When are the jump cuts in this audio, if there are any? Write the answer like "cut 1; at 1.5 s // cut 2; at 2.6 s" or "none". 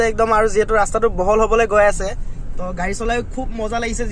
none